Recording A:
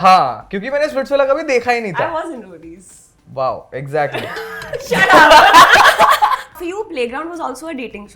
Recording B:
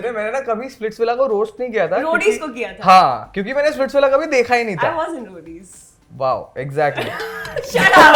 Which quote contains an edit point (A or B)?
A